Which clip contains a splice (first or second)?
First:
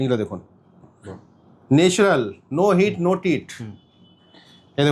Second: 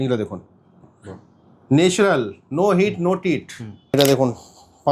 second